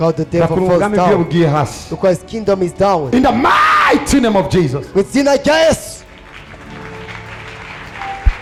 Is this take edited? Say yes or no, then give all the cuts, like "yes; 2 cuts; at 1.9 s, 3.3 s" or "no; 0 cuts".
no; 0 cuts